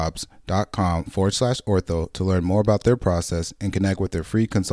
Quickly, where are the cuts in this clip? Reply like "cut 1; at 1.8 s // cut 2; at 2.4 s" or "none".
none